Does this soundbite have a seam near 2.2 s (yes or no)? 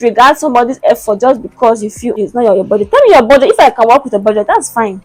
yes